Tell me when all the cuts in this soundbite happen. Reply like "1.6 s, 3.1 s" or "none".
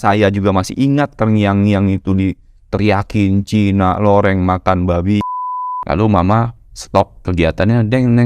5.3 s, 7.2 s